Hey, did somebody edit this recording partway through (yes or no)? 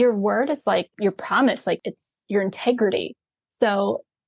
yes